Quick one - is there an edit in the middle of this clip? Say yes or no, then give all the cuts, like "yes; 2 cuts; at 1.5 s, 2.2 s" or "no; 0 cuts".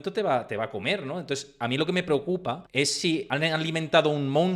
yes; 1 cut; at 3.1 s